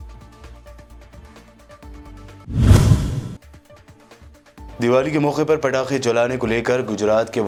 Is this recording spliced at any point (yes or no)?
no